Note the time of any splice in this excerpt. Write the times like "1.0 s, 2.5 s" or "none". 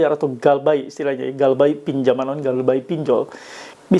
none